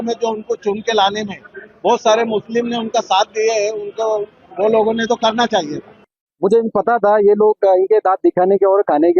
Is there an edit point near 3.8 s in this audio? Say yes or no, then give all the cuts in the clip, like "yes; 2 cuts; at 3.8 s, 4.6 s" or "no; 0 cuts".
no; 0 cuts